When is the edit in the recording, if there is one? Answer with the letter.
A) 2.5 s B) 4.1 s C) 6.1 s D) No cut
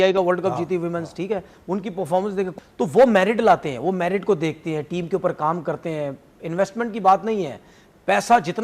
A